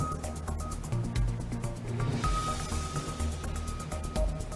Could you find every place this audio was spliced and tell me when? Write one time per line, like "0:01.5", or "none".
0:00.9